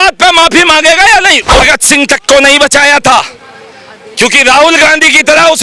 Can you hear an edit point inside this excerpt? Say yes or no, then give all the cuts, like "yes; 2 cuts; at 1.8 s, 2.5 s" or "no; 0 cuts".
yes; 1 cut; at 1.6 s